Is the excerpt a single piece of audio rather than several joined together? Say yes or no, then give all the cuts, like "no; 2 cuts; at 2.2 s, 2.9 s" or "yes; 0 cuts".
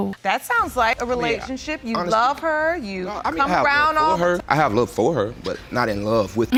yes; 0 cuts